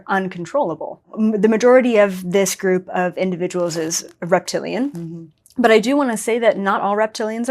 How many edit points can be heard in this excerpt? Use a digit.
1